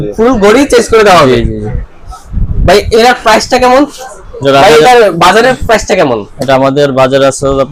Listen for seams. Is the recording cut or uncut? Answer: uncut